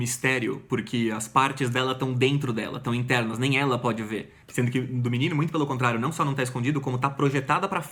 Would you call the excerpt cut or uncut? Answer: uncut